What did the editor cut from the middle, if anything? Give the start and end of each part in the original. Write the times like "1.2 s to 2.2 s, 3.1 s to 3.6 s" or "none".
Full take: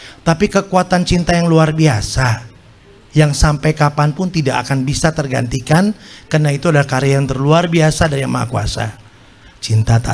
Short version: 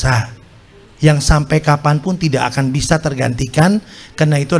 none